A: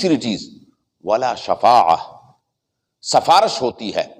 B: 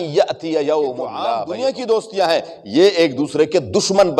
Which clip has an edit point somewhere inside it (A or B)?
B